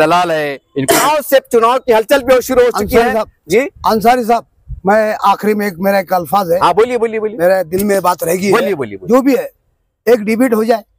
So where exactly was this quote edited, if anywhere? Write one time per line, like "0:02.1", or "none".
0:01.0
0:09.0